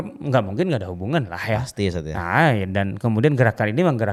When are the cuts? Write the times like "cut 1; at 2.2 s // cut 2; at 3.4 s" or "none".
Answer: none